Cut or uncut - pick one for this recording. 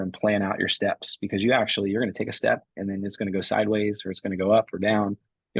uncut